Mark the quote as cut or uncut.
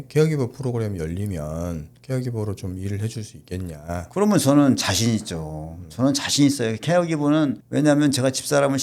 cut